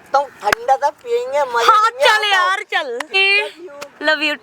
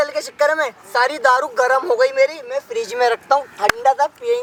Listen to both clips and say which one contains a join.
first; 1 cut; at 3.1 s

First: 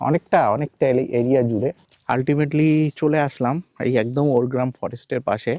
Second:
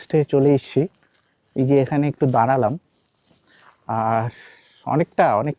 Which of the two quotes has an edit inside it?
first; 1 cut; at 1.9 s

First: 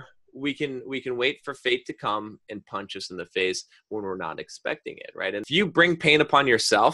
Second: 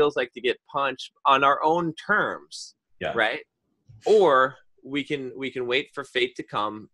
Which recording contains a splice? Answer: first; 1 cut; at 5.4 s

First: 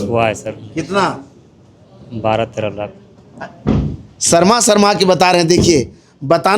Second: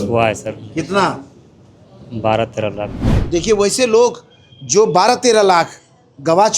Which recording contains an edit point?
second; 1 cut; at 3.1 s

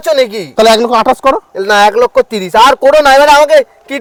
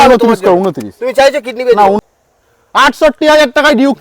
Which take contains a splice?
second; 1 cut; at 2.0 s

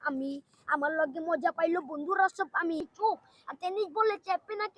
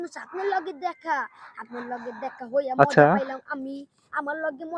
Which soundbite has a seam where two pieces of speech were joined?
first; 1 cut; at 2.8 s

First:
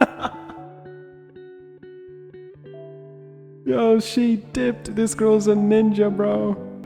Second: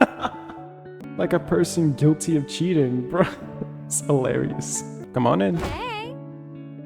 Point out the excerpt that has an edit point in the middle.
second; 2 cuts; at 1.0 s, 4.9 s

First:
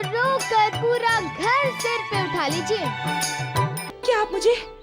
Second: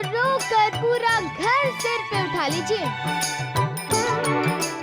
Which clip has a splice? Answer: first; 1 cut; at 3.8 s

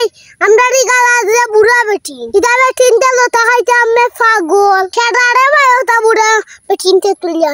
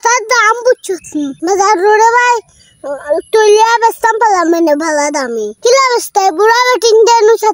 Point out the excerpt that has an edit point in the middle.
second; 1 cut; at 5.6 s

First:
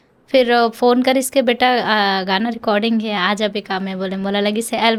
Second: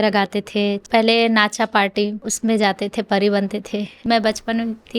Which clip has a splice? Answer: second; 3 cuts; at 0.8 s, 2.2 s, 4.0 s

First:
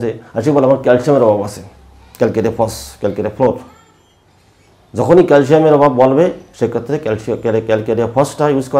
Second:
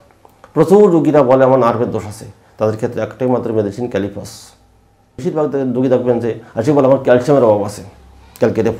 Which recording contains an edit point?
second; 1 cut; at 5.2 s

